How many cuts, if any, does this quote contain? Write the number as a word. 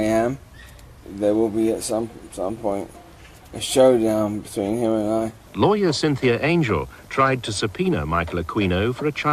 two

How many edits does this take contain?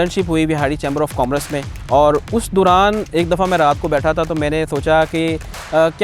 one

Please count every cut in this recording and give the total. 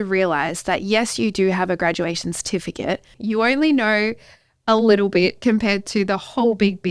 one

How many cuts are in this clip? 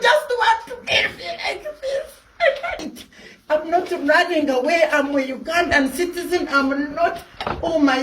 one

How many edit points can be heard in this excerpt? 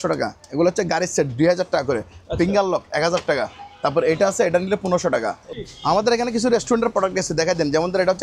one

